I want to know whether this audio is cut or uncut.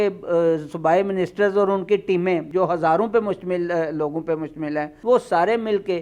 cut